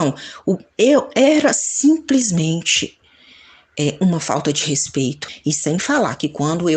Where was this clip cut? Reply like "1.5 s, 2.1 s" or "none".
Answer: 5.3 s